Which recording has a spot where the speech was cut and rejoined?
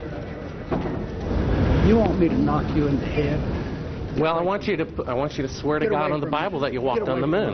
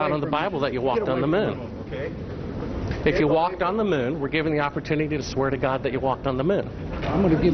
first; 1 cut; at 1.2 s

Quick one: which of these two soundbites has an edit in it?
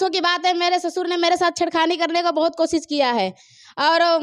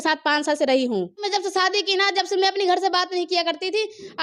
second; 1 cut; at 1.3 s

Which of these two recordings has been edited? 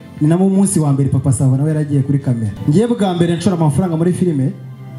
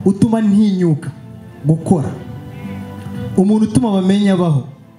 first; 1 cut; at 2.5 s

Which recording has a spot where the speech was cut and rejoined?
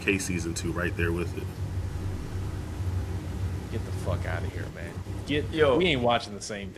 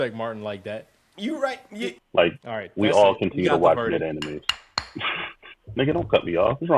second; 1 cut; at 2.0 s

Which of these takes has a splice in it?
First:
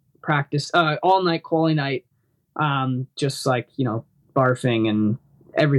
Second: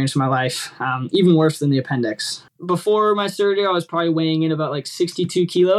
second; 1 cut; at 2.4 s

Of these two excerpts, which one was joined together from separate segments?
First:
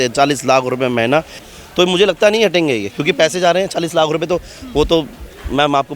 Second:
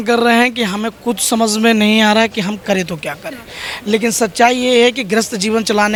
first; 1 cut; at 1.4 s

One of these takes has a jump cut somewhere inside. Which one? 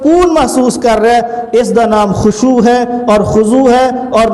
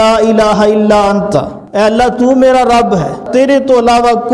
second; 2 cuts; at 1.6 s, 3.3 s

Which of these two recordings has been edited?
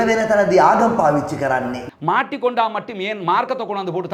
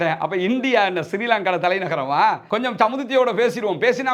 second; 1 cut; at 2.4 s

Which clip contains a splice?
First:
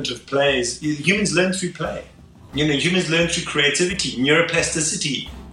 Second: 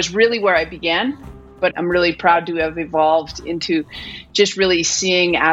second; 1 cut; at 1.6 s

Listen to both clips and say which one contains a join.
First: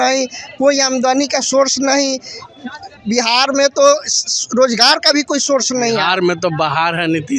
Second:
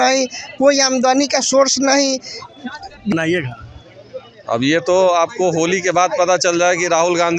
second; 1 cut; at 3.1 s

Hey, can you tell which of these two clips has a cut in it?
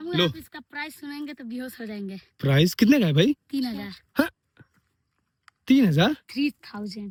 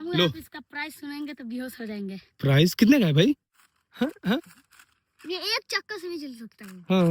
second; 1 cut; at 3.4 s

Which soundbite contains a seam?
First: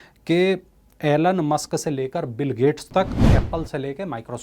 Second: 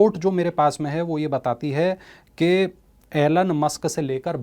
first; 1 cut; at 3.3 s

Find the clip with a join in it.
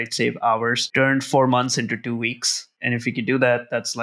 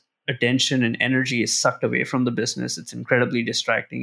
first; 2 cuts; at 0.8 s, 2.7 s

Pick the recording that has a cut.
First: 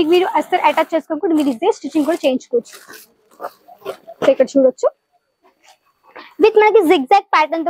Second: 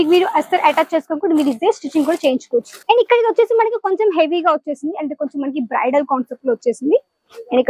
second; 1 cut; at 2.7 s

